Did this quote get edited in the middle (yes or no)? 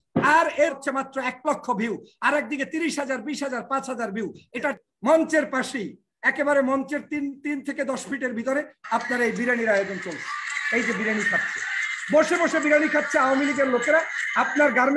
yes